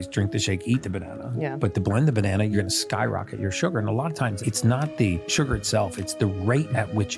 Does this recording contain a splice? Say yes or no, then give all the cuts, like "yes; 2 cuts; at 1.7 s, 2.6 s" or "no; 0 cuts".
no; 0 cuts